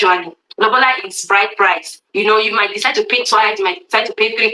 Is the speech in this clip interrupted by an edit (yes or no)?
yes